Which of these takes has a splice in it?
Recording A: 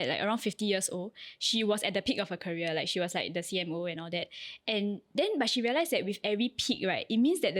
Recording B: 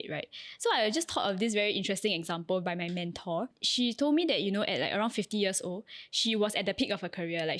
B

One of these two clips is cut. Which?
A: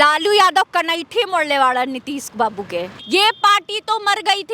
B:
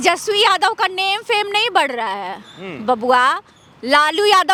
A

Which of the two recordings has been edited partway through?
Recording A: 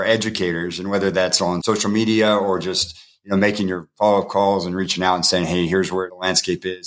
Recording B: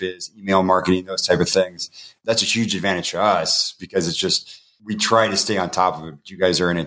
B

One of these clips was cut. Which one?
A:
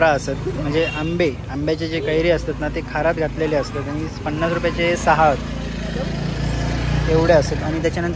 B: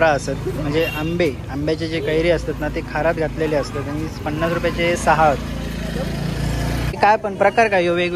B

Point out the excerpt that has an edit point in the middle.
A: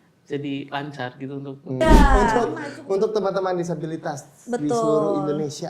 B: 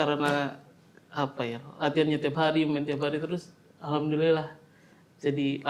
A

